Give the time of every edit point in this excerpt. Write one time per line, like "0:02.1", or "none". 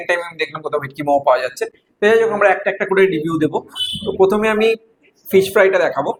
none